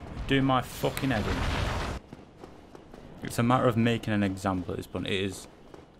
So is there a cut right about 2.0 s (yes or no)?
yes